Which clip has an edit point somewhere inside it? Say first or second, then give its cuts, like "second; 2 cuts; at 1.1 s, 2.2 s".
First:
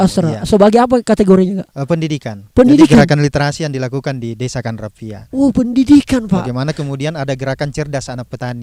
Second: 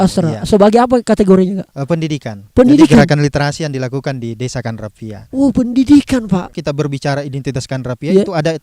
second; 1 cut; at 6.5 s